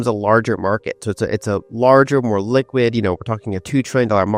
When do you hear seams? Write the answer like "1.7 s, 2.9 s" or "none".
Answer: none